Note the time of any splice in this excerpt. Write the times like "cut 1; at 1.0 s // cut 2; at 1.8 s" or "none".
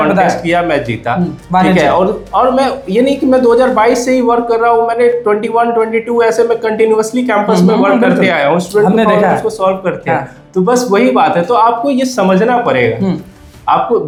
none